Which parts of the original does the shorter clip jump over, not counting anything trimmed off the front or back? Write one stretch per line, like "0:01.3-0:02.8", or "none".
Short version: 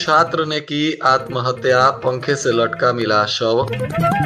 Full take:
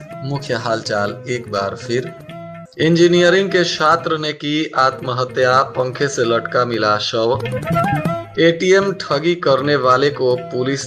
none